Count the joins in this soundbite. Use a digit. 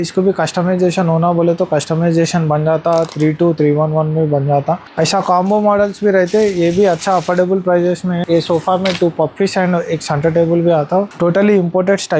3